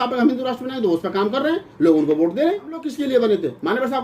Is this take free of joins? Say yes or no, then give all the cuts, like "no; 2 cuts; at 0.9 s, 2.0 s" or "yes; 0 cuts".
no; 1 cut; at 2.9 s